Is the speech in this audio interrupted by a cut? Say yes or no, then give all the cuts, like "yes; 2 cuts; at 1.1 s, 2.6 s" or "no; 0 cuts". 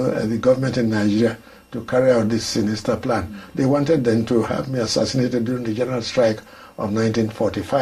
no; 0 cuts